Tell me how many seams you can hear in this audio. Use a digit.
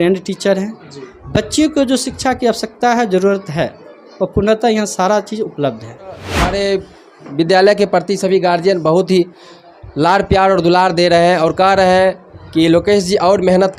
1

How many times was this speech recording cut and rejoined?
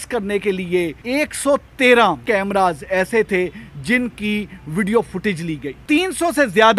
3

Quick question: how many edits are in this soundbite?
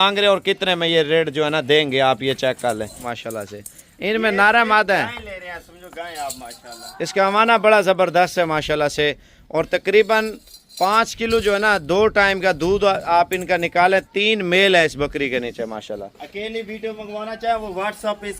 1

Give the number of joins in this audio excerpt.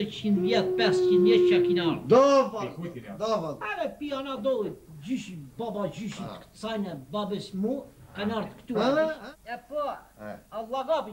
1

